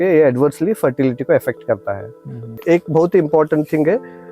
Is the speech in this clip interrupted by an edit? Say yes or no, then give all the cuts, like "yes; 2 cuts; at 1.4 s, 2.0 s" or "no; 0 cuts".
yes; 1 cut; at 2.5 s